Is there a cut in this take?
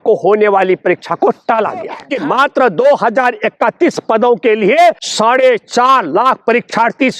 yes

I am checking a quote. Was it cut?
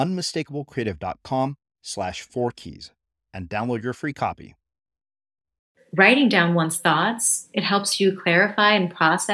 yes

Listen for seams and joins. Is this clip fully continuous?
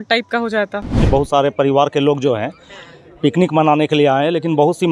no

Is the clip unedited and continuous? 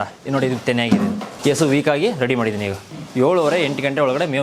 no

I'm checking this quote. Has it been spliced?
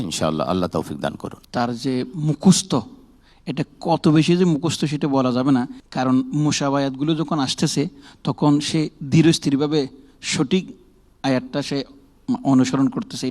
yes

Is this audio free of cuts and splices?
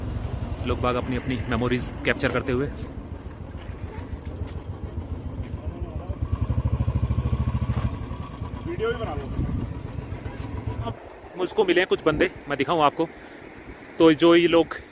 yes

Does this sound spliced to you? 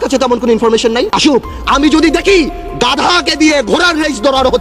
yes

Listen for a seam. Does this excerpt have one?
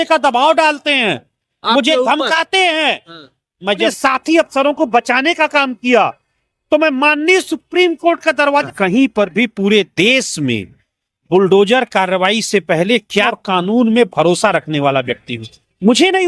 yes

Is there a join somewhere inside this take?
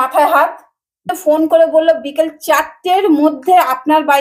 yes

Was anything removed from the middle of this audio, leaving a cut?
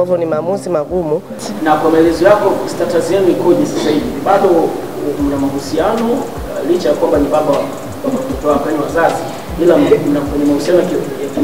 yes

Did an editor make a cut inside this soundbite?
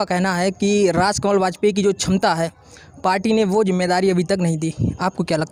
no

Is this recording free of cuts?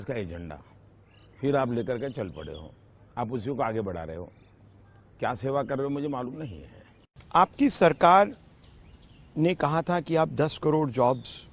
no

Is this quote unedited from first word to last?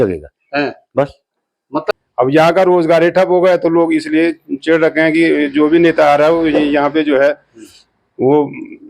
no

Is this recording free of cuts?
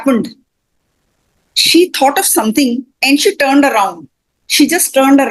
yes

